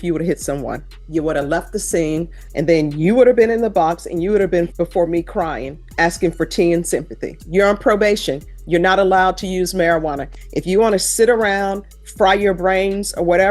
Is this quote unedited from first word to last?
no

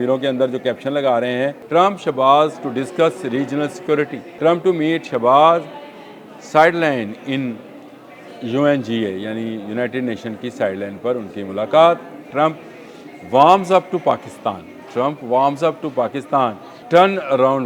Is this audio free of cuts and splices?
no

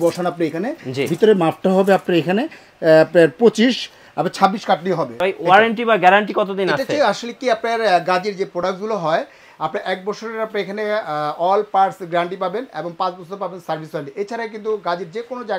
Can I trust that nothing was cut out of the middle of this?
no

